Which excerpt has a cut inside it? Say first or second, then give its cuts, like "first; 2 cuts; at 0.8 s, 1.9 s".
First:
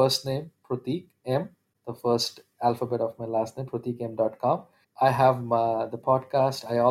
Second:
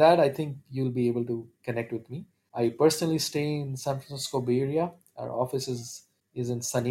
first; 1 cut; at 4.8 s